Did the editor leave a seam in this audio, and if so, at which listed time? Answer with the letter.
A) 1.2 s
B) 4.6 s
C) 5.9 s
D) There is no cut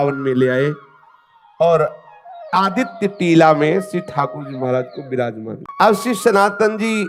C